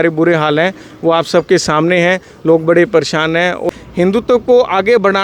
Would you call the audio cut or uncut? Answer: cut